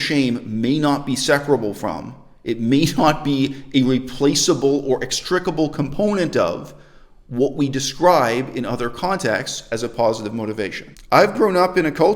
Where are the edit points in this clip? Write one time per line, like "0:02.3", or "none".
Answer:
0:10.9